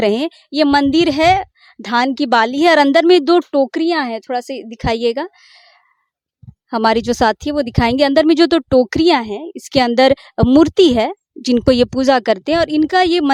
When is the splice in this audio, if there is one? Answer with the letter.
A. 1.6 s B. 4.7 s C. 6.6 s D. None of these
D